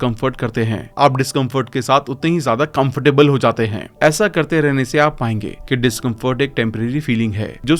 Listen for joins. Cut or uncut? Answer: uncut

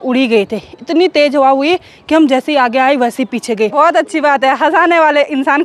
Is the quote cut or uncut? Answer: cut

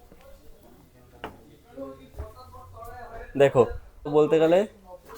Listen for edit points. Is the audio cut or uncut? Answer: cut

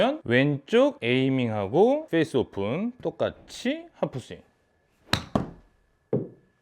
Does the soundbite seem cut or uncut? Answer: cut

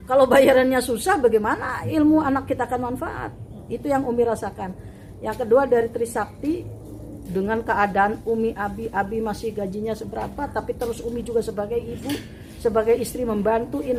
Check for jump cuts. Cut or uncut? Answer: uncut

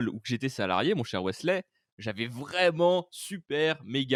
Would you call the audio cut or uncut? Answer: uncut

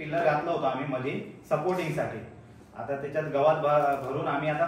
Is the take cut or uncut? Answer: uncut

